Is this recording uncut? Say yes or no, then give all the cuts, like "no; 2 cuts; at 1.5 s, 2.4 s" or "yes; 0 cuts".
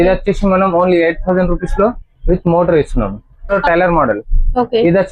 no; 1 cut; at 3.6 s